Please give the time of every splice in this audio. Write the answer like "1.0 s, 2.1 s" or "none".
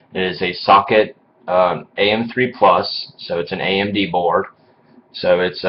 none